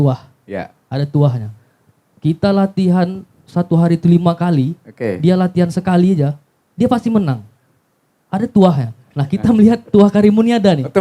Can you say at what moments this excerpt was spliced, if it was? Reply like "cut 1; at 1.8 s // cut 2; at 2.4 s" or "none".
none